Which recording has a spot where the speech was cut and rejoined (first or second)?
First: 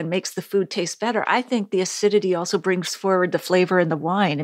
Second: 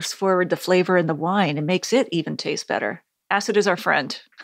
second